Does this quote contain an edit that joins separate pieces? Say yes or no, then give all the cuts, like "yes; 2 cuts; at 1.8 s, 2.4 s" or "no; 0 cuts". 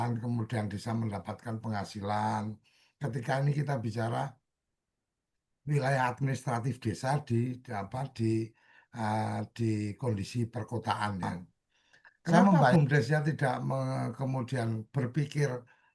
yes; 1 cut; at 12.7 s